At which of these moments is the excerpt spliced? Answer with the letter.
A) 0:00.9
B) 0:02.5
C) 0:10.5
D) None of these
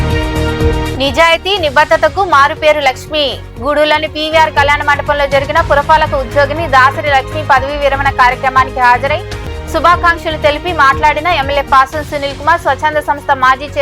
A